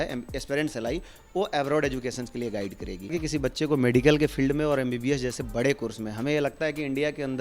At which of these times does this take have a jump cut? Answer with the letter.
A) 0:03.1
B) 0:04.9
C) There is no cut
A